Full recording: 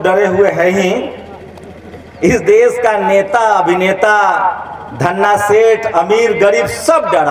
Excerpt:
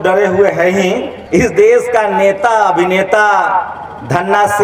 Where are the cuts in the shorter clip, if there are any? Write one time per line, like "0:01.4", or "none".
0:01.1

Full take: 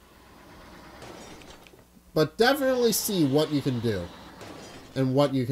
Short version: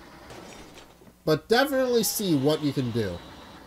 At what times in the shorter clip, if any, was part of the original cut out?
0:01.0

